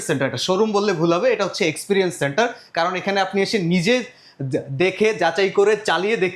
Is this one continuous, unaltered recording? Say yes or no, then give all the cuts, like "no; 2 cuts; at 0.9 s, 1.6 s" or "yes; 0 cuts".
yes; 0 cuts